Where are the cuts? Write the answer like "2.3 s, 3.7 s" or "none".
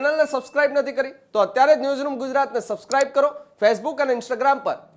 none

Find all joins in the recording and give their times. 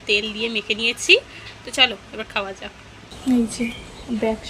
3.2 s

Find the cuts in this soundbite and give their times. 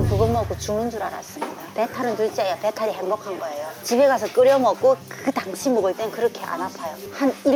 none

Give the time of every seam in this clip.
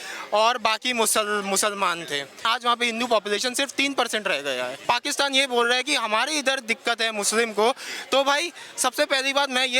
2.4 s, 4.8 s

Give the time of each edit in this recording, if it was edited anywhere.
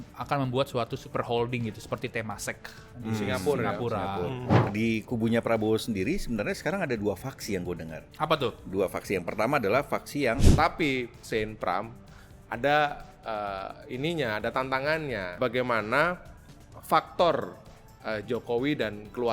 4.7 s, 10.5 s, 15.4 s

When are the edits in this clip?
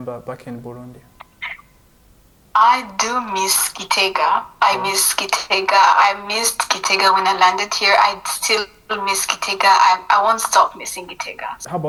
none

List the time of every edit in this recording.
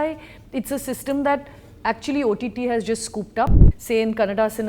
3.5 s

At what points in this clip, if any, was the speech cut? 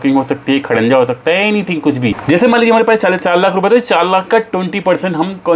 none

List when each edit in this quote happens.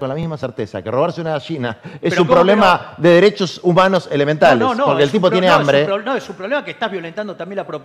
none

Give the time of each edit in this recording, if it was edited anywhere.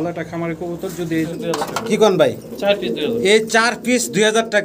1.3 s

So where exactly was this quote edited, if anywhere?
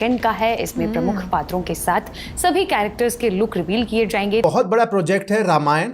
4.4 s

